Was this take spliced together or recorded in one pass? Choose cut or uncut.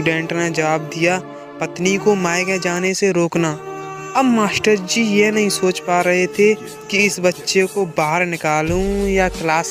uncut